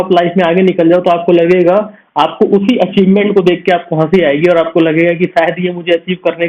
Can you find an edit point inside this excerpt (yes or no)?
no